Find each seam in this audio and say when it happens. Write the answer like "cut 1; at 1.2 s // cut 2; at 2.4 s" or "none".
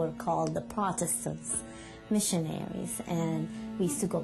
cut 1; at 3.0 s